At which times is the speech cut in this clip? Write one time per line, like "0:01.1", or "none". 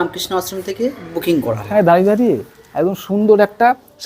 0:01.7